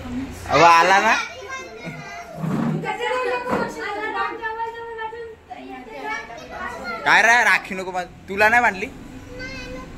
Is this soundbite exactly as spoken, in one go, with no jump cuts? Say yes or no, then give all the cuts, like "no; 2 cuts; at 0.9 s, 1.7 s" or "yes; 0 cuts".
yes; 0 cuts